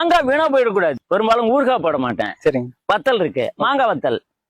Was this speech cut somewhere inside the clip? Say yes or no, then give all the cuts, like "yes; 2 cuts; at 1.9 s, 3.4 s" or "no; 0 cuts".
yes; 1 cut; at 1.0 s